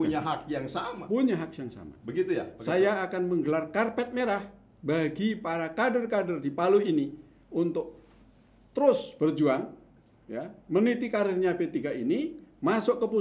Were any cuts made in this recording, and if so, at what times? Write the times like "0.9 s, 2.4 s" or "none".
none